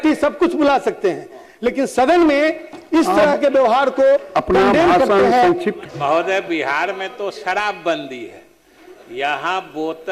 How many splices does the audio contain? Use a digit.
1